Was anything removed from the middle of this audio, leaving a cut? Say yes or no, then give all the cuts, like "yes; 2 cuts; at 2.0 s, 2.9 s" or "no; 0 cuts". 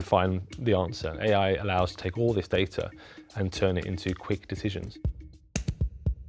yes; 1 cut; at 4.9 s